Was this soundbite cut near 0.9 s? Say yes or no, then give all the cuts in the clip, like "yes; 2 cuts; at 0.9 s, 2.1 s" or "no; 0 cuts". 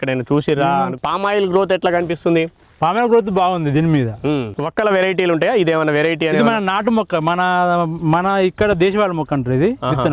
yes; 2 cuts; at 0.9 s, 4.5 s